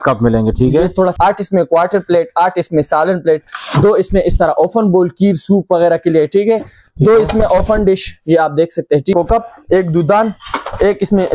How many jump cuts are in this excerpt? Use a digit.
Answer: 2